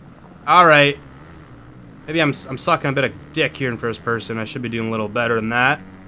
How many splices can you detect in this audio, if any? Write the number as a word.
zero